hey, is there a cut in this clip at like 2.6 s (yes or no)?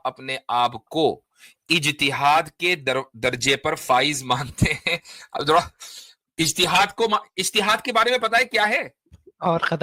no